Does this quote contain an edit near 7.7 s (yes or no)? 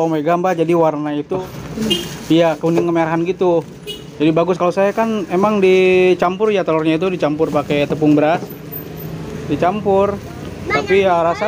no